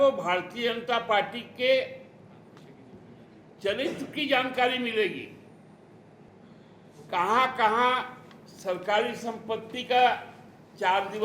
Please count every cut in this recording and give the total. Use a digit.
1